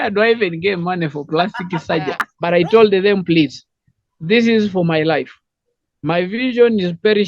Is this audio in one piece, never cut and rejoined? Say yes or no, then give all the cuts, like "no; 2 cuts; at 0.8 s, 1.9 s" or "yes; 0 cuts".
no; 1 cut; at 2.2 s